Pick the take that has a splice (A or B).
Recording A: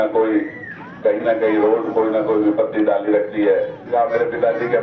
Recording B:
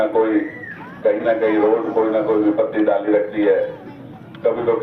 A